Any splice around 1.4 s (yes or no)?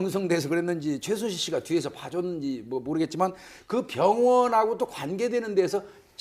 no